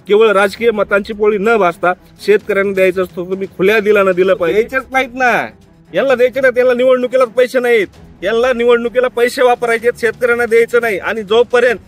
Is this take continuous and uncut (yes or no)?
no